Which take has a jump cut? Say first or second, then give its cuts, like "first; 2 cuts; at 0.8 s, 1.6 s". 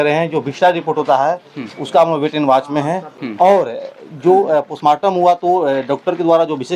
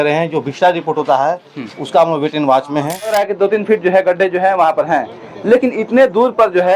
second; 1 cut; at 3.1 s